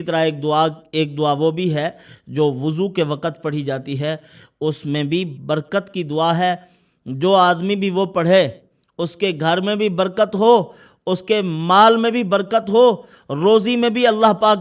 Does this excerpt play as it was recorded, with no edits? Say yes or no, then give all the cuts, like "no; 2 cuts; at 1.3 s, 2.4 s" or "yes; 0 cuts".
yes; 0 cuts